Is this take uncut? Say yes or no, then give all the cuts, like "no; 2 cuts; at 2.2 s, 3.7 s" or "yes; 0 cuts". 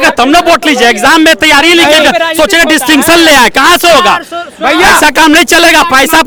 yes; 0 cuts